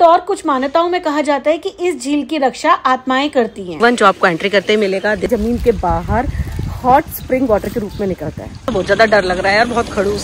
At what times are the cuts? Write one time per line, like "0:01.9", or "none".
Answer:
0:03.8
0:05.3
0:08.7

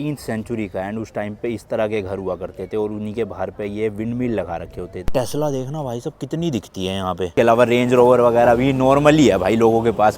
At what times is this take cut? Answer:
0:05.1
0:07.4

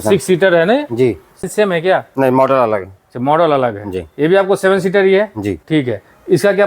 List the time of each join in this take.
0:01.5
0:05.6

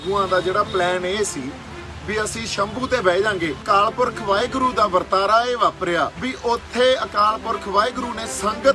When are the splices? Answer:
0:03.6
0:06.2

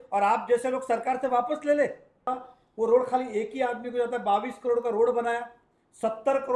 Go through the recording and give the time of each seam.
0:02.3

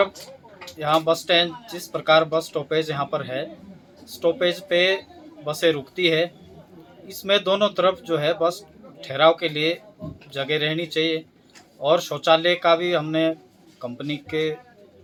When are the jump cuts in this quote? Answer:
none

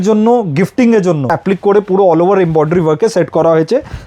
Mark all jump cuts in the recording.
0:01.3

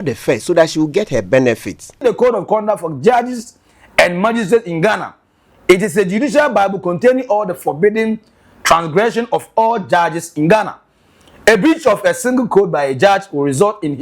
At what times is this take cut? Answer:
0:02.0

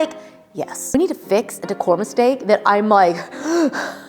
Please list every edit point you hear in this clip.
0:00.9

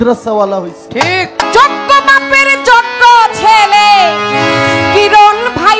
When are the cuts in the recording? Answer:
0:01.5

